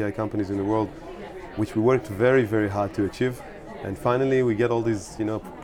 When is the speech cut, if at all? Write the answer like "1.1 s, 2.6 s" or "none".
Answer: none